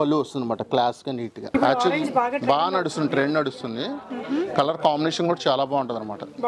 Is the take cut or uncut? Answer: cut